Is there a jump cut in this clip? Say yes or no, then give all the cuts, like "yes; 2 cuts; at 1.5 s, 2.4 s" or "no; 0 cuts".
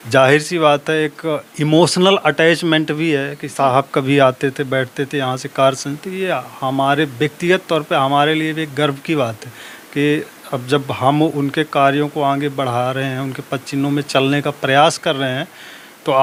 no; 0 cuts